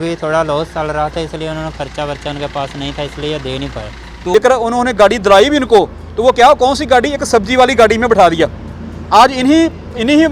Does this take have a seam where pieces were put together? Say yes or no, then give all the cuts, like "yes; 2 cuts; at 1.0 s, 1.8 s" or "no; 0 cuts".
yes; 1 cut; at 4.2 s